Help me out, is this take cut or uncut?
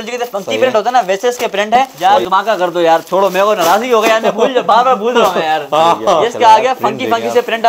cut